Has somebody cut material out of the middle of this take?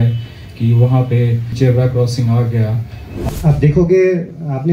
yes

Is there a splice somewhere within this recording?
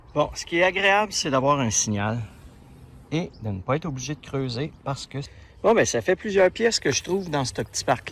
yes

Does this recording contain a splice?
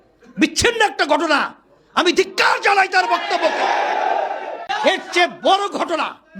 yes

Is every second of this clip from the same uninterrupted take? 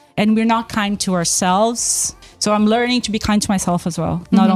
no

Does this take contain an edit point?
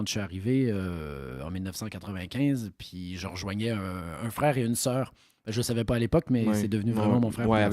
no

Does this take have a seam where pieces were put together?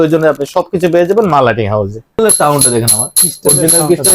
yes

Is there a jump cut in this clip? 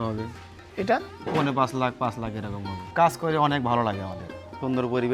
yes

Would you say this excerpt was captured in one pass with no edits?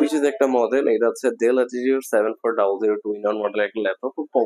yes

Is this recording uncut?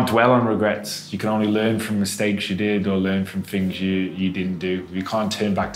yes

